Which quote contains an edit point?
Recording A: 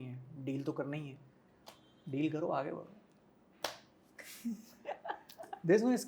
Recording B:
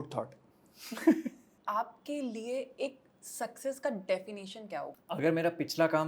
B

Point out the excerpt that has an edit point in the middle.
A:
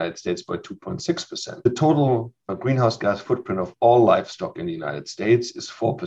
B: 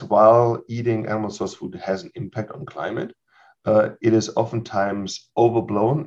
A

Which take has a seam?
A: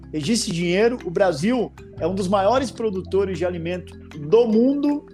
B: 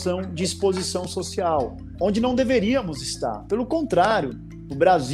B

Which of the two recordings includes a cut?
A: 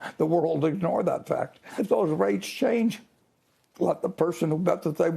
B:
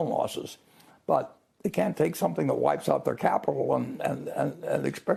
A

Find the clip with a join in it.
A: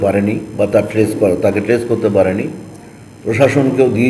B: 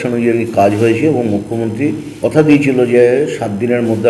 B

